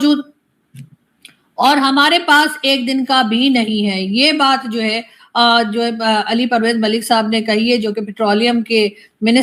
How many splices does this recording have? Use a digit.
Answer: 0